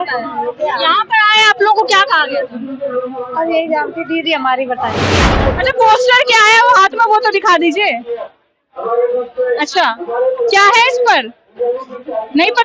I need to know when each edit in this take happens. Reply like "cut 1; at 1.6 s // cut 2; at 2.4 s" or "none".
cut 1; at 5.2 s